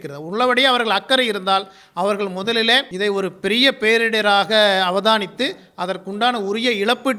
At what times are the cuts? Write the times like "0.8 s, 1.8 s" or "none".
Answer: 2.9 s

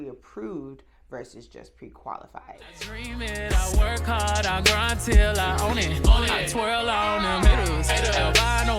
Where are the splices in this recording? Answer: 2.7 s

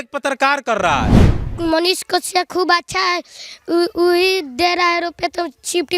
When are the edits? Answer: 1.2 s

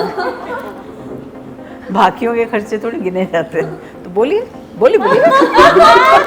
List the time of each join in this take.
none

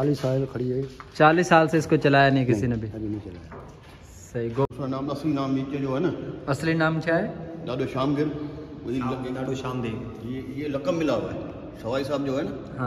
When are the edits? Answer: 4.6 s

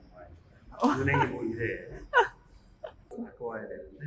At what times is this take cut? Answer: 3.1 s

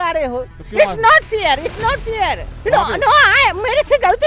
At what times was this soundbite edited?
2.5 s

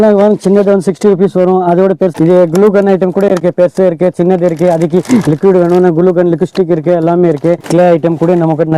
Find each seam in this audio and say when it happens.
2.1 s, 7.6 s

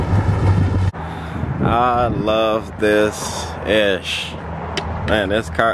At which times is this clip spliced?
0.9 s

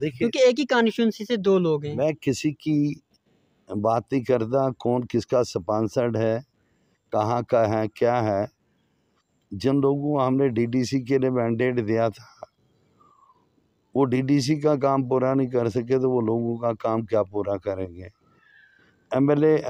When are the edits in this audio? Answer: none

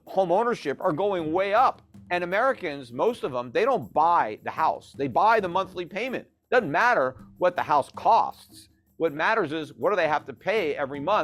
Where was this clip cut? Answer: 1.9 s

